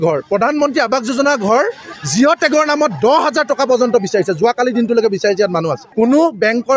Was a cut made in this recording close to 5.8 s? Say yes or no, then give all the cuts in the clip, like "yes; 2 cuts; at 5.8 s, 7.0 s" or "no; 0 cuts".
yes; 1 cut; at 5.8 s